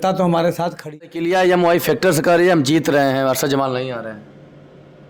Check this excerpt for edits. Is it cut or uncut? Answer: cut